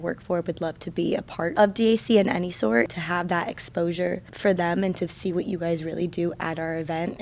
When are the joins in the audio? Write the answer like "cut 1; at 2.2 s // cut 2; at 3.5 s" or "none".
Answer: cut 1; at 1.5 s // cut 2; at 2.9 s // cut 3; at 4.3 s